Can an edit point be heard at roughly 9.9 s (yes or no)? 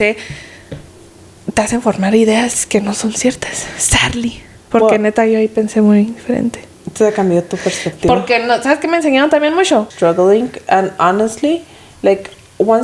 yes